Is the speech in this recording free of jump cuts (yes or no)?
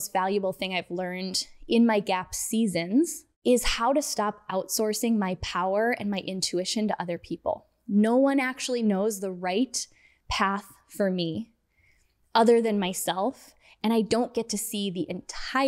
no